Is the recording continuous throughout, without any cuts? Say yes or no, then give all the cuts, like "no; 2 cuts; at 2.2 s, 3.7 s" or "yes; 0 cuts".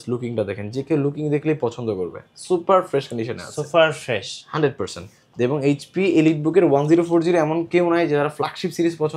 yes; 0 cuts